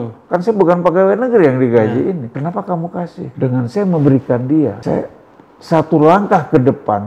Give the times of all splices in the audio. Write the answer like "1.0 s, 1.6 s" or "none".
2.3 s, 3.3 s, 4.8 s